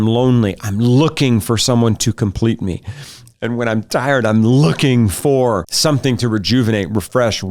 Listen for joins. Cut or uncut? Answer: cut